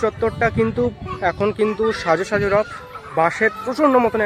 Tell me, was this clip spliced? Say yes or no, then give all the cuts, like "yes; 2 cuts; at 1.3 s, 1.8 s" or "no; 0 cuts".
no; 0 cuts